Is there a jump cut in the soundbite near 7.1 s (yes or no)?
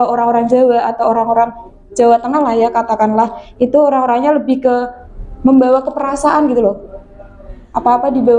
no